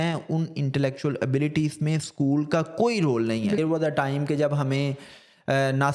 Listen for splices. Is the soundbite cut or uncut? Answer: cut